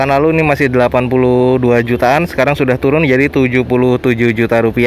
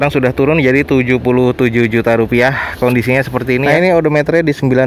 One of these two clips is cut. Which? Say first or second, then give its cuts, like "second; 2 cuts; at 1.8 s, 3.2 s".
second; 1 cut; at 3.6 s